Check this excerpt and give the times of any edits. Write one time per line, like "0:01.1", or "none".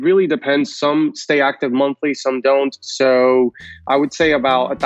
none